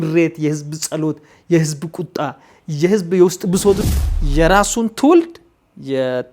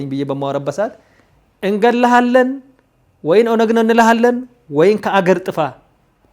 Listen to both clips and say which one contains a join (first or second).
first